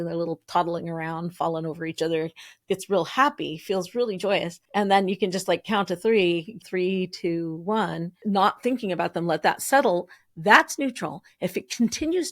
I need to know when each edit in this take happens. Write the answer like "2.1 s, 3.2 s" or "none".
4.6 s, 6.6 s, 8.1 s